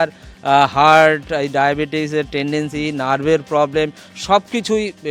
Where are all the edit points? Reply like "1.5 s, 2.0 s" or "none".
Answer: none